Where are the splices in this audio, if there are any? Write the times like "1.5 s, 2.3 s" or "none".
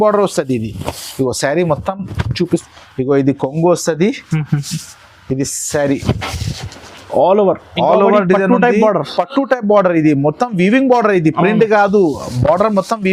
2.6 s